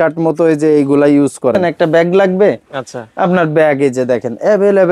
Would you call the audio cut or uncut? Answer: cut